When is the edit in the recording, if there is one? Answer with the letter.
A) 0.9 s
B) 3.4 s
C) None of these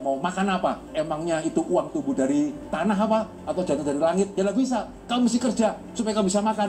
A